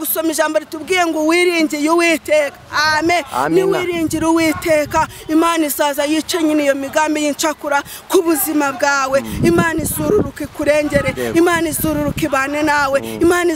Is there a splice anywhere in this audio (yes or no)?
no